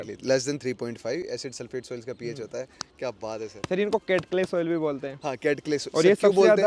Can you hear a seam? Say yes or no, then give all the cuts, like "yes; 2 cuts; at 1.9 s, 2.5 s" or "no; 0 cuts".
no; 0 cuts